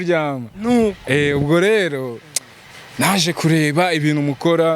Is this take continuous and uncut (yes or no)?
yes